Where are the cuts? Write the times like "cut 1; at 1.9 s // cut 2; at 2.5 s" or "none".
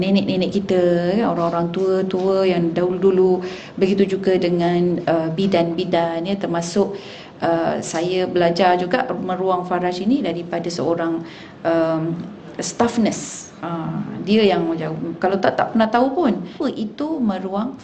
cut 1; at 16.5 s